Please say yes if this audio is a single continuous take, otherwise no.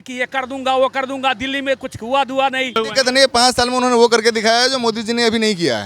no